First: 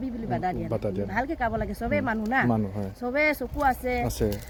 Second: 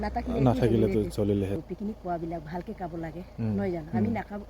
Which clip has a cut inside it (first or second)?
second